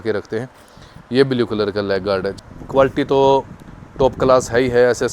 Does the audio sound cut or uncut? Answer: cut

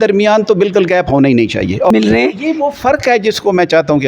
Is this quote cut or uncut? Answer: cut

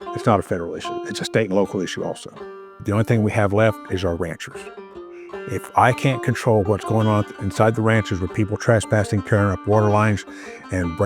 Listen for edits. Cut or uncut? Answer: cut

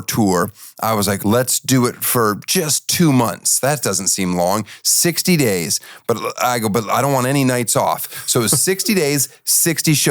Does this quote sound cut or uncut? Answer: cut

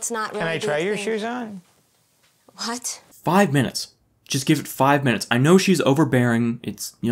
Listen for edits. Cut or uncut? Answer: cut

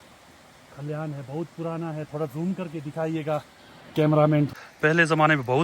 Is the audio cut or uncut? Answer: cut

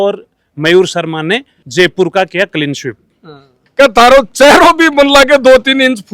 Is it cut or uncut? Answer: cut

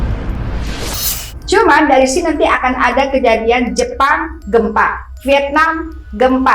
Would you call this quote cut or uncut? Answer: cut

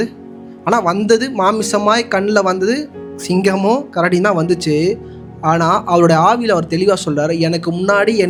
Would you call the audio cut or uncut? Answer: uncut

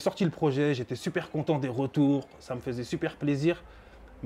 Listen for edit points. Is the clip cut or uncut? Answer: uncut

